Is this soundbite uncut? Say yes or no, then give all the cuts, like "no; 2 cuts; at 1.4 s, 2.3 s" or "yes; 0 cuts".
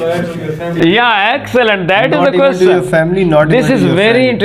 yes; 0 cuts